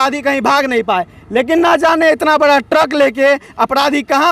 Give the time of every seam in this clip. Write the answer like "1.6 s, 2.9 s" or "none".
none

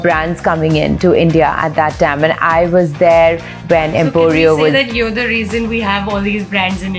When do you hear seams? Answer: none

